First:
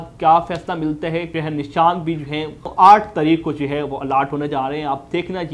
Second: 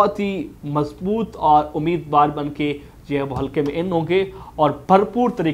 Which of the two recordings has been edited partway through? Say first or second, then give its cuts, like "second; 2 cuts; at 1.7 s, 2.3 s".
first; 2 cuts; at 1.3 s, 2.7 s